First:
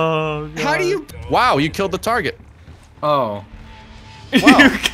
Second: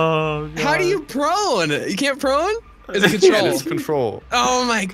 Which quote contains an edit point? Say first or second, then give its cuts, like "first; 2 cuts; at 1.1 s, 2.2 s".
first; 1 cut; at 1.1 s